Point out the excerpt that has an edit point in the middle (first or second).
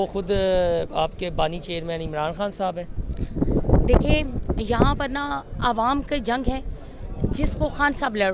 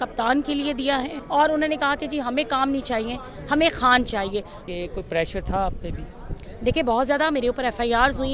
second